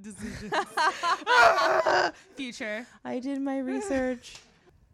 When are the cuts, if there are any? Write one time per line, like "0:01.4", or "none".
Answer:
none